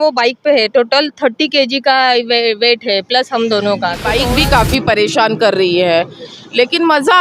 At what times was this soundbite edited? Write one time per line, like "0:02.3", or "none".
0:04.0